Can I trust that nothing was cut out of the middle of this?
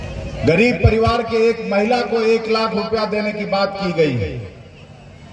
yes; 0 cuts

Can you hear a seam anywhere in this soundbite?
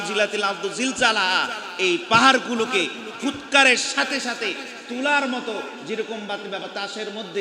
no; 0 cuts

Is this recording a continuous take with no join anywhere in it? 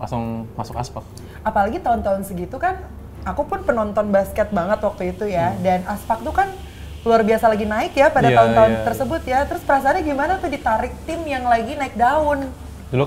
yes; 0 cuts

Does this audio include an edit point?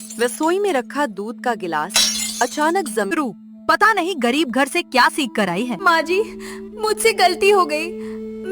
yes; 2 cuts; at 3.1 s, 5.8 s

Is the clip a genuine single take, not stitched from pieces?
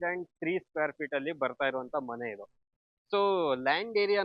yes; 0 cuts

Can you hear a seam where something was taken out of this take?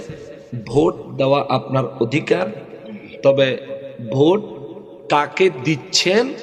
no; 0 cuts

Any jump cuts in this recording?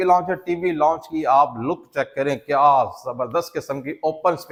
no; 0 cuts

